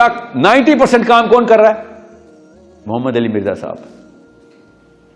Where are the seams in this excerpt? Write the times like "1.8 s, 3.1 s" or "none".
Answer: 4.3 s